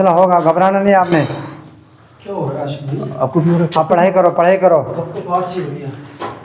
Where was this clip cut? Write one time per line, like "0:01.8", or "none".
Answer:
none